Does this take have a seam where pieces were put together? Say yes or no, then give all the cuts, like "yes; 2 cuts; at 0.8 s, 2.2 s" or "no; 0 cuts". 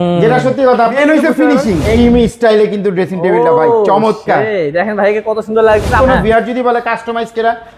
yes; 3 cuts; at 0.9 s, 2.0 s, 6.0 s